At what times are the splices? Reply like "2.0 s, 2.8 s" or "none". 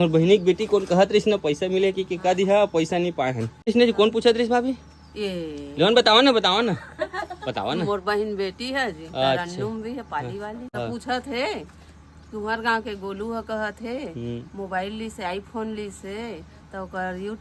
3.7 s, 10.7 s